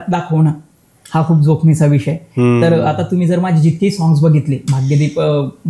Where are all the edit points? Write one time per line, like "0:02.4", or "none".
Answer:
none